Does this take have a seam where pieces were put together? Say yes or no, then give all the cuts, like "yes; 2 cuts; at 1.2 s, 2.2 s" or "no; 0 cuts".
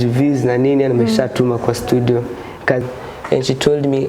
yes; 1 cut; at 2.8 s